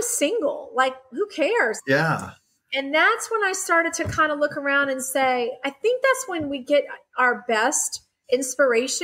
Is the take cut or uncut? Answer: cut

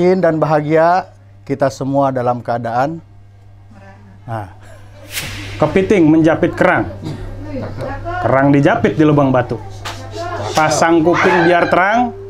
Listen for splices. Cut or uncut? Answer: cut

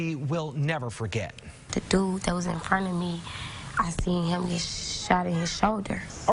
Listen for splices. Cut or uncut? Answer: uncut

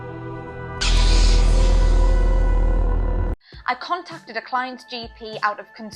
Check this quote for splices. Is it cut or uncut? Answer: cut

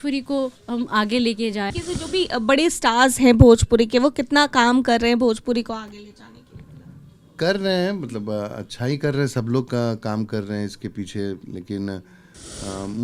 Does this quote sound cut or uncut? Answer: cut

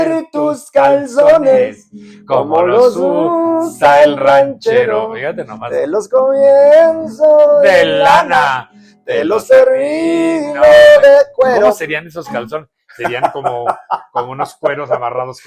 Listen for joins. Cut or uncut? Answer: uncut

